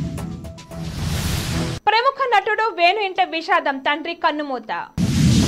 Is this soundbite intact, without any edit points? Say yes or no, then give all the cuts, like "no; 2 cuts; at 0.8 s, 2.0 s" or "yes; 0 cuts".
yes; 0 cuts